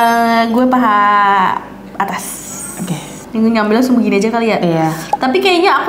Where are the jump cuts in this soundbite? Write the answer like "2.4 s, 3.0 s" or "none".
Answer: none